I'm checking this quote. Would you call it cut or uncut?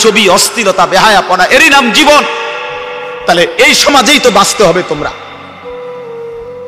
cut